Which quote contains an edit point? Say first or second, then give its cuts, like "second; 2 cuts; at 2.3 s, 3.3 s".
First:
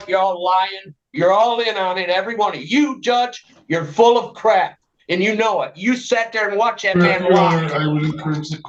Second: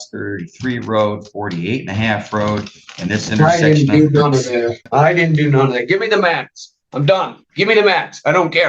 second; 1 cut; at 4.8 s